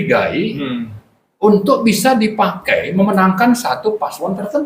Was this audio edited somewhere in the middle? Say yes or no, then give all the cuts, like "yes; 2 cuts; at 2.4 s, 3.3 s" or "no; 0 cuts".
no; 0 cuts